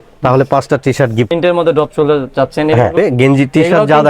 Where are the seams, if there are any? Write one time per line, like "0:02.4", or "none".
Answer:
0:01.3
0:02.9